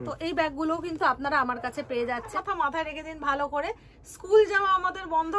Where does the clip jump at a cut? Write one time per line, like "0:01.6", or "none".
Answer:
0:02.3